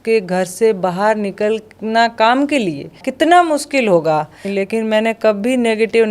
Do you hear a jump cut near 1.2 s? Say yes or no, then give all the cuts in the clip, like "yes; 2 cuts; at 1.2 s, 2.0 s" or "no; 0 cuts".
no; 2 cuts; at 3.1 s, 4.5 s